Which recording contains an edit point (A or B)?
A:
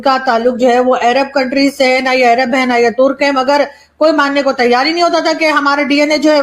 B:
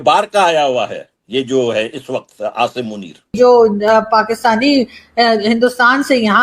B